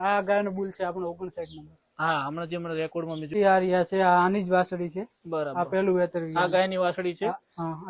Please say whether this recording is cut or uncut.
cut